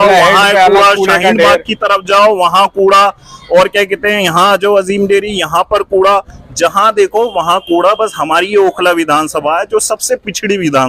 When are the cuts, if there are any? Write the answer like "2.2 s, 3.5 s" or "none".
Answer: none